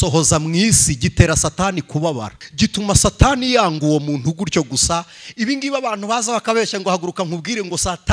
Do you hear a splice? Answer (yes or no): yes